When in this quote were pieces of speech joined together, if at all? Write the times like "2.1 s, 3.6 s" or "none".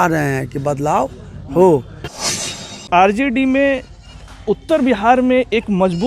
2.2 s